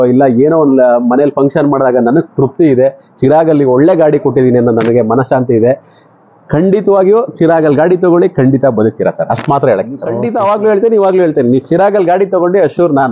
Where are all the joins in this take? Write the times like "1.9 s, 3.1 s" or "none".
10.2 s